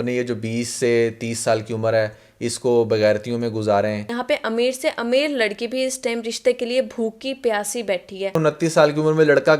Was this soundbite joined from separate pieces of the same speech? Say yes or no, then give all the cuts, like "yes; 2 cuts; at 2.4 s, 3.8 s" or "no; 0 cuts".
yes; 2 cuts; at 4.1 s, 8.4 s